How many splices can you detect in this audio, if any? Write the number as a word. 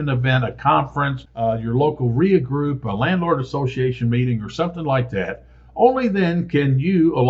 zero